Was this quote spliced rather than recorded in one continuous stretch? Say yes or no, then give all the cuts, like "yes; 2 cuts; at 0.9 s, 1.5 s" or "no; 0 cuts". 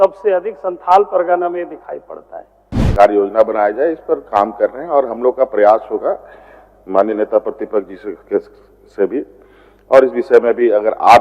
yes; 1 cut; at 2.9 s